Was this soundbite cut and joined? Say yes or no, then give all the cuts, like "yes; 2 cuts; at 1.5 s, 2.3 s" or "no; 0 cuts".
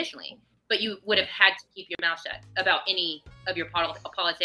no; 0 cuts